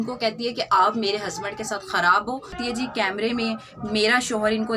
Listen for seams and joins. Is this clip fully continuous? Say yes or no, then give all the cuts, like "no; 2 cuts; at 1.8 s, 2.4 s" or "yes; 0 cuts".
no; 1 cut; at 2.6 s